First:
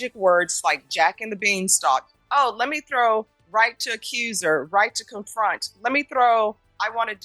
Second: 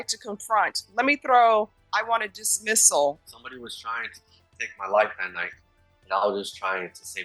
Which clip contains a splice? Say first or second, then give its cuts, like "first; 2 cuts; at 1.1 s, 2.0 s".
second; 1 cut; at 3.3 s